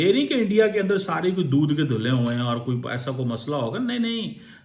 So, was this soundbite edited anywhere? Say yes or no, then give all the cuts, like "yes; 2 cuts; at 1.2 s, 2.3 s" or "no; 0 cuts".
no; 0 cuts